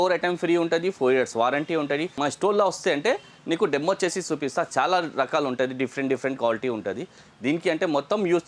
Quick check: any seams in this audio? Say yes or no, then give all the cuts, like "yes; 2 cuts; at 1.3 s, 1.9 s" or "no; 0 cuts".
yes; 1 cut; at 2.1 s